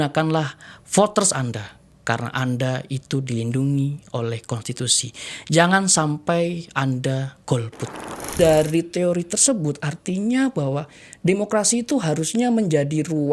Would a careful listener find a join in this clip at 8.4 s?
yes; 1 cut; at 8.4 s

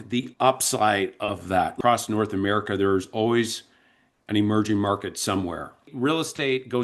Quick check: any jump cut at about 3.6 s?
no; 2 cuts; at 1.7 s, 5.9 s

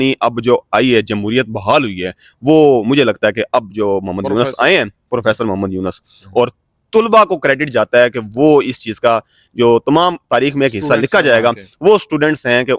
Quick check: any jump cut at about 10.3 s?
no; 0 cuts

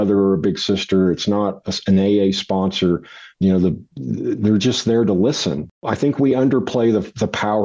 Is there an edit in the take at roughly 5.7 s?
yes; 1 cut; at 5.7 s

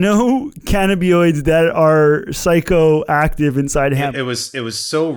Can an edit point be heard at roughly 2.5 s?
no; 1 cut; at 4.1 s

